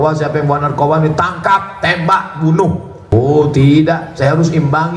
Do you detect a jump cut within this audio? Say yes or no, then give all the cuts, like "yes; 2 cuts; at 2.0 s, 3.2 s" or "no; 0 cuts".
yes; 1 cut; at 3.0 s